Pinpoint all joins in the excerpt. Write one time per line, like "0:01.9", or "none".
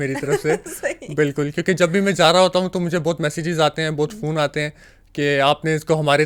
none